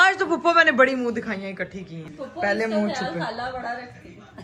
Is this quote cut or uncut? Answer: cut